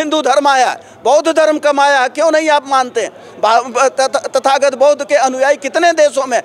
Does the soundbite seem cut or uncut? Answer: uncut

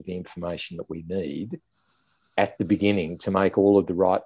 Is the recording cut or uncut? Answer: uncut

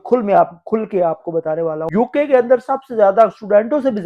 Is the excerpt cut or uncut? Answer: cut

